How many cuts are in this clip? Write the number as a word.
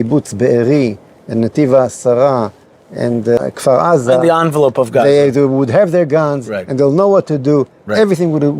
one